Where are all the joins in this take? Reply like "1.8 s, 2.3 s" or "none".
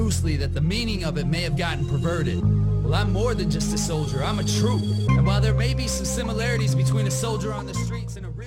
none